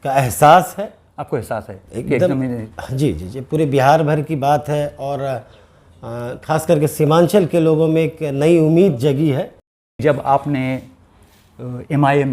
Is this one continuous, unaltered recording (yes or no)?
no